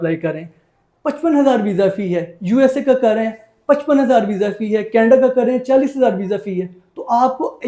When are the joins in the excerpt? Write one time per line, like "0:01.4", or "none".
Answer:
none